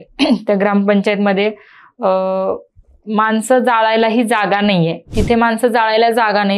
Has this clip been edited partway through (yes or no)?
yes